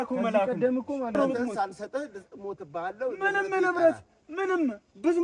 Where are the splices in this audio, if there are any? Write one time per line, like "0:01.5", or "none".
0:01.1